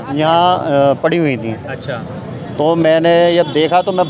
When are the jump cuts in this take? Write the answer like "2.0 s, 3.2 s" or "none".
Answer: none